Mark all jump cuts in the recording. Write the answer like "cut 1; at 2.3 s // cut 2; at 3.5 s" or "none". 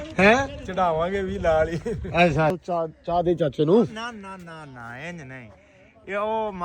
cut 1; at 2.5 s